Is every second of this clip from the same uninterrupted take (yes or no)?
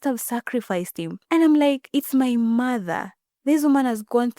no